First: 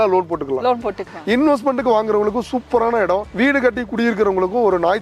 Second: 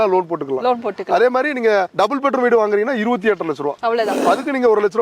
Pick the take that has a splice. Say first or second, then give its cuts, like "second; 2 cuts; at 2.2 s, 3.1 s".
first; 1 cut; at 1.0 s